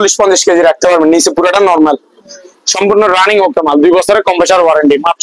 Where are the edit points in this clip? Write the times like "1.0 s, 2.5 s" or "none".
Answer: none